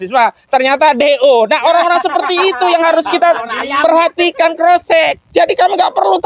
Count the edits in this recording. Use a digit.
1